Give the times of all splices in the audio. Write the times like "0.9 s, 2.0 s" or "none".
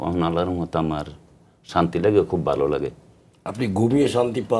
none